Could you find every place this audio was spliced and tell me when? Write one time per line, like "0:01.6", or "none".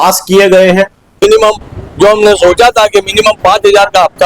0:01.2